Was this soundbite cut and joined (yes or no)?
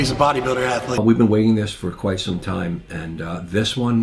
yes